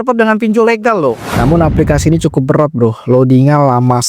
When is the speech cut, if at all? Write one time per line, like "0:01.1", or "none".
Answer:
0:01.3